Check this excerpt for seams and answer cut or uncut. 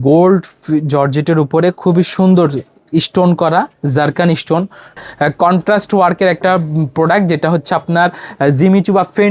cut